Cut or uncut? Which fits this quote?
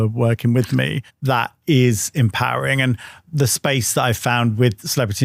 uncut